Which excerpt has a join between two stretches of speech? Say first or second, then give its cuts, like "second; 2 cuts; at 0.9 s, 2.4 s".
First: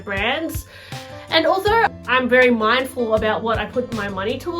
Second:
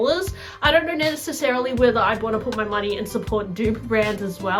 first; 1 cut; at 1.9 s